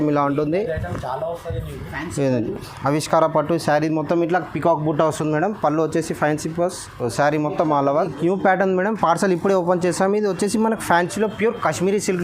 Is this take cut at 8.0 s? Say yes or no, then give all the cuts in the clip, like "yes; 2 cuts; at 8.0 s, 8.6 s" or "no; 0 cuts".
yes; 1 cut; at 8.0 s